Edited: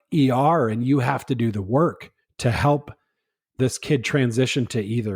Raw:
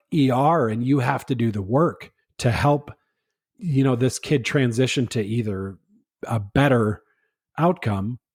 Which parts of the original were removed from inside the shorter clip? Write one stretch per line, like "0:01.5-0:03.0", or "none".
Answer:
0:03.6-0:04.0